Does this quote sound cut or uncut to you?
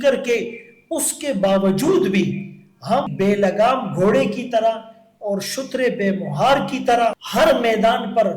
cut